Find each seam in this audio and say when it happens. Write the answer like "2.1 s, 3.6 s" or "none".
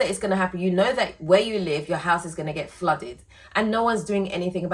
none